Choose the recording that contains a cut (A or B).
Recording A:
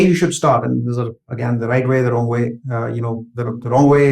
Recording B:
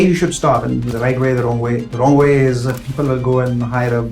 B